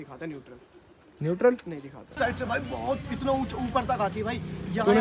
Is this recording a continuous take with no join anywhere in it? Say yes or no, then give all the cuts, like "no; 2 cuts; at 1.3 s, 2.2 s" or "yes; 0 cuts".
no; 1 cut; at 2.1 s